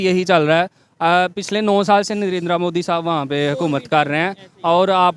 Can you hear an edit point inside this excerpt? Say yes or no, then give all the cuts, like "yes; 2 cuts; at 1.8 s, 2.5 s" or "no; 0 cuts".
no; 0 cuts